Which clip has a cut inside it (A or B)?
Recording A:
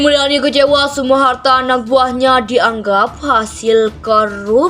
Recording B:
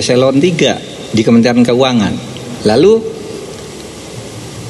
B